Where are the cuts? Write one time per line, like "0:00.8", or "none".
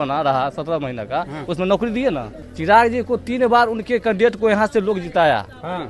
0:02.4

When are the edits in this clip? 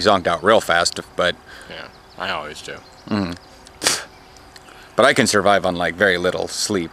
none

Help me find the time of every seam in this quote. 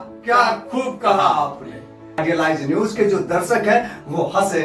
0:02.0

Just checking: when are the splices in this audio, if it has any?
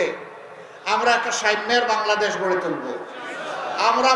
none

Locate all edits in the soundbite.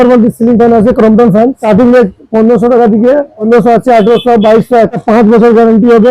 0:01.6
0:03.5
0:05.0

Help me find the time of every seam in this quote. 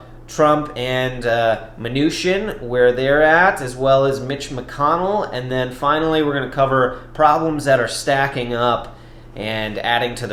none

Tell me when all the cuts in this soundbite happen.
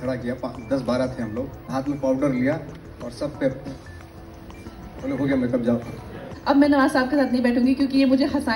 0:01.7
0:06.3

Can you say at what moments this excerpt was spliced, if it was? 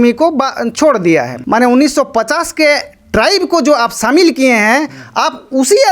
0:01.4

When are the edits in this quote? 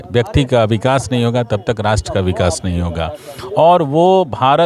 none

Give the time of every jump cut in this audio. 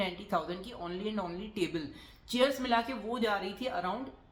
none

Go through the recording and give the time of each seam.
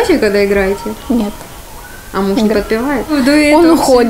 0:03.1

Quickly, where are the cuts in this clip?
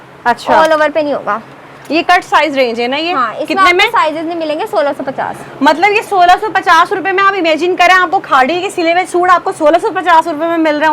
none

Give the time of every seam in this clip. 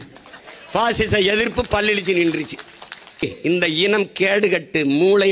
0:03.2

